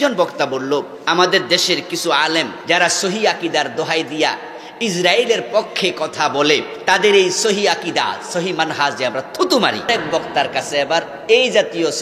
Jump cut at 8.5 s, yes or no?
no